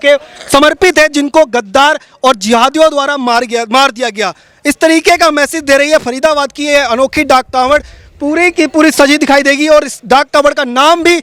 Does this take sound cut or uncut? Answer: uncut